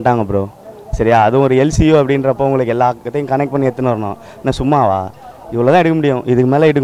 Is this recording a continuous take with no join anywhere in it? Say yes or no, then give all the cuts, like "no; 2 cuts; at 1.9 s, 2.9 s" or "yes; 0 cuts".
yes; 0 cuts